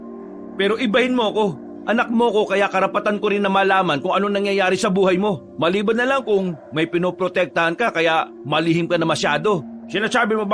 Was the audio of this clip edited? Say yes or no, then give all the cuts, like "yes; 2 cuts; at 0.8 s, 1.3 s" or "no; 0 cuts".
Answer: yes; 2 cuts; at 1.7 s, 5.5 s